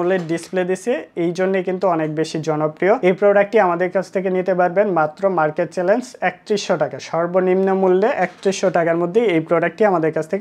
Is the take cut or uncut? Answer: uncut